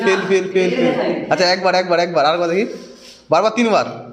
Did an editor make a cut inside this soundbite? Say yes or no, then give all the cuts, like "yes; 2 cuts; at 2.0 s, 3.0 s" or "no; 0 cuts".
no; 0 cuts